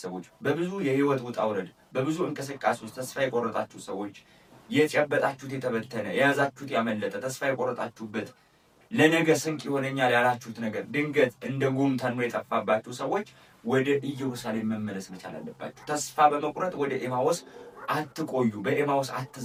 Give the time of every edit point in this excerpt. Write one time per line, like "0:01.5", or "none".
none